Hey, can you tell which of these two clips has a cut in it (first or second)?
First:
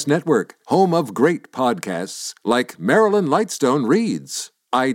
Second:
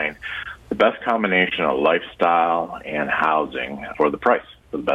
second